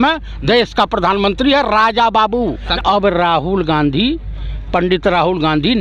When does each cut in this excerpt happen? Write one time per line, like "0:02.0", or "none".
0:02.7